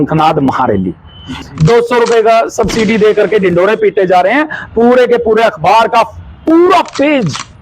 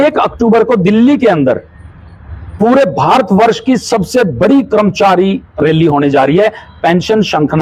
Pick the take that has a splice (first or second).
first